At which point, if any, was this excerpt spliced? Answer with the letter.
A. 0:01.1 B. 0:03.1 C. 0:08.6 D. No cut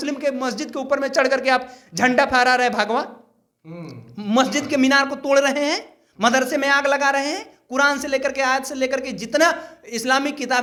D